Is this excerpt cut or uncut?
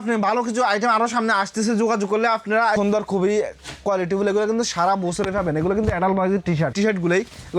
cut